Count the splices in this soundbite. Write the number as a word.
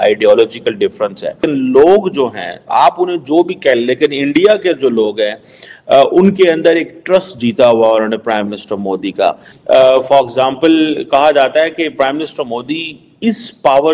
two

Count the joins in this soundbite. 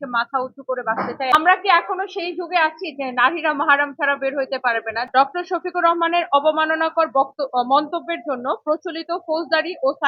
two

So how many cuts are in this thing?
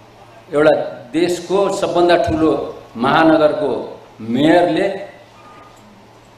zero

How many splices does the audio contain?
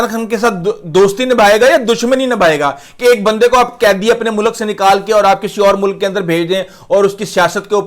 zero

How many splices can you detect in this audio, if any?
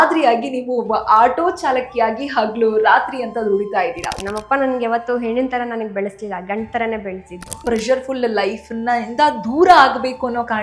two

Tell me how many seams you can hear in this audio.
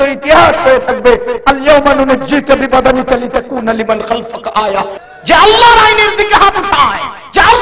one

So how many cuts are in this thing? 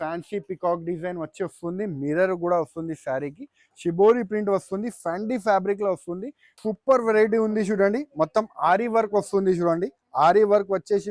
one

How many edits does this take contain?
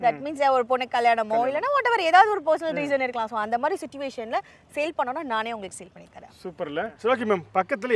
one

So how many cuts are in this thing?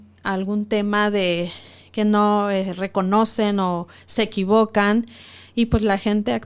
zero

